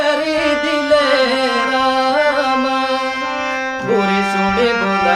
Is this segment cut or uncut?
uncut